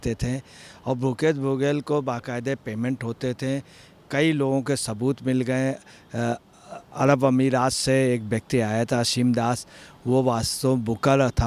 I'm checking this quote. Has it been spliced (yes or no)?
no